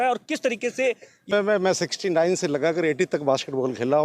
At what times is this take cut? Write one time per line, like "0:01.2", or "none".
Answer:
0:01.3